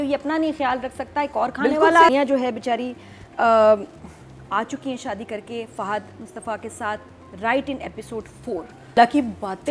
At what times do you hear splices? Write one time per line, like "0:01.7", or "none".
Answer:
0:02.1
0:09.0